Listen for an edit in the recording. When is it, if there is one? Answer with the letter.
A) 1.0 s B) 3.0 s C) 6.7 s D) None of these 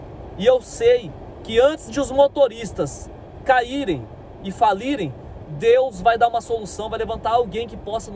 D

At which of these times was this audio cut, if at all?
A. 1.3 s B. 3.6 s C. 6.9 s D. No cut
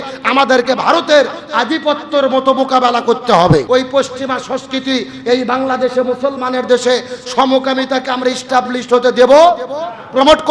B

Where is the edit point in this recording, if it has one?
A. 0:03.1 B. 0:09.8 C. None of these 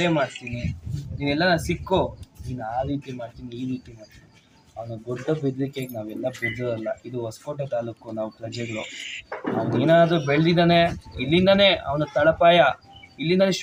C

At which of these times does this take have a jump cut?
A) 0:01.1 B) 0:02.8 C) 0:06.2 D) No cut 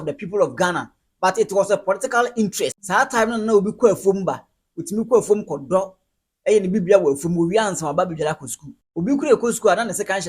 B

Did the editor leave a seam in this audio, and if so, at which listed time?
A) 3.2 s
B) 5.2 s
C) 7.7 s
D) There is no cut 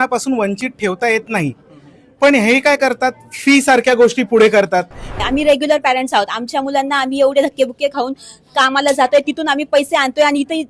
B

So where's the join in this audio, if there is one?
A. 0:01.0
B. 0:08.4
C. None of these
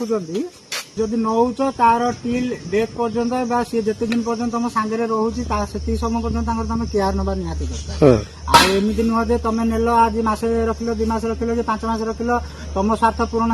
A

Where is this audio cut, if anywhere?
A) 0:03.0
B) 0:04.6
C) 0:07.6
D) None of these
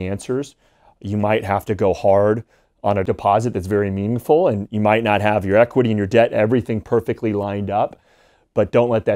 A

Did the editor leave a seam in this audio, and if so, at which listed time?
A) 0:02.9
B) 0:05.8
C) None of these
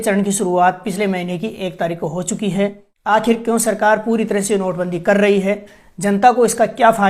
A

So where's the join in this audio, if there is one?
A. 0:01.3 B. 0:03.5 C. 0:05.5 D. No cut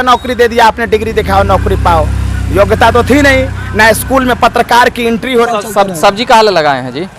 C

